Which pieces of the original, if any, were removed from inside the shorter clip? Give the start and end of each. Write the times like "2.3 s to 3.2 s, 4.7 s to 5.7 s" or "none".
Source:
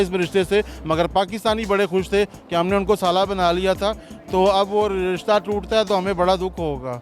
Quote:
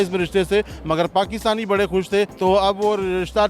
2.3 s to 4.3 s